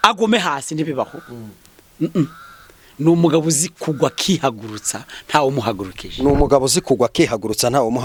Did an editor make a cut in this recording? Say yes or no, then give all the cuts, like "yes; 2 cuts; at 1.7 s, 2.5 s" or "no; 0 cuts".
no; 0 cuts